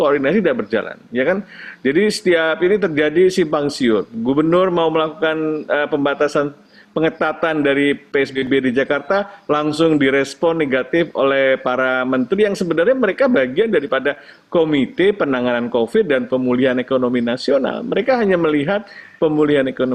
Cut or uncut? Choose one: uncut